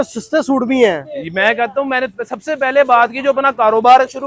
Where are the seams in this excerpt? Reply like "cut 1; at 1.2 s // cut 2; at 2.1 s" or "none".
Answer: none